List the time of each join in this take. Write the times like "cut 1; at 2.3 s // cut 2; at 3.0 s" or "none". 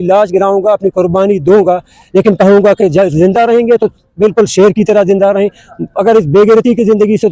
none